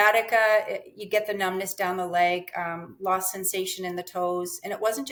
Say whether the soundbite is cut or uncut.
uncut